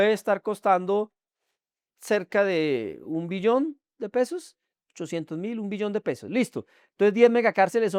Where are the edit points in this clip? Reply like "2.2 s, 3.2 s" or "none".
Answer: none